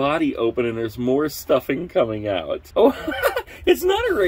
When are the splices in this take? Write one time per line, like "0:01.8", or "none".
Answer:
0:02.6